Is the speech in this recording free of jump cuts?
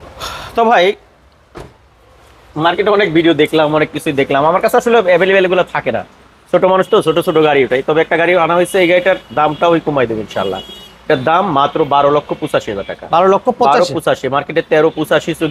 yes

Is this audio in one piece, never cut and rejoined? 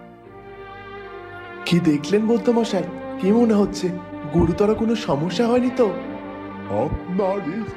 yes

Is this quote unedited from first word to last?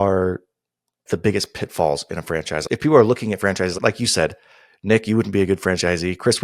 no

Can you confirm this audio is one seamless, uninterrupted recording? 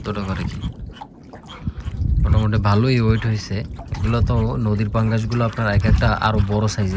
yes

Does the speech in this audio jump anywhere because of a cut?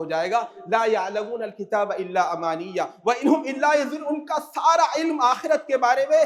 no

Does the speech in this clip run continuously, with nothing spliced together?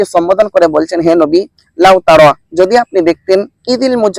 yes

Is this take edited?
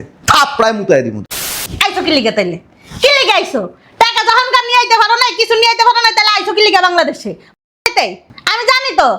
yes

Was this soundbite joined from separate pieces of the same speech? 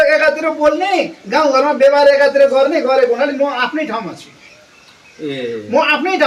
no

